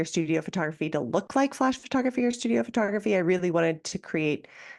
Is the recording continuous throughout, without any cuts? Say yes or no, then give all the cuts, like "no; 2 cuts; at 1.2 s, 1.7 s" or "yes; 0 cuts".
yes; 0 cuts